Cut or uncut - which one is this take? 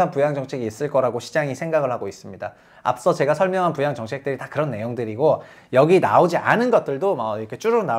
uncut